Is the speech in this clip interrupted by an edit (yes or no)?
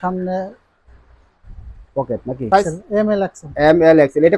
yes